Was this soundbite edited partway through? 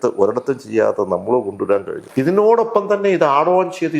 yes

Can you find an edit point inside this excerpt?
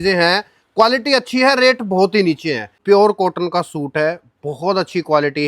yes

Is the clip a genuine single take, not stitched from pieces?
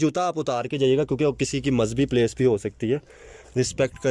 yes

